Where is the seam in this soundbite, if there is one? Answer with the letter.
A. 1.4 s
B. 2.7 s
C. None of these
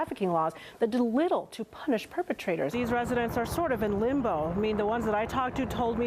B